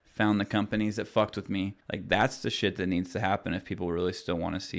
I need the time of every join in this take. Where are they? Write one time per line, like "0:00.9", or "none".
0:01.8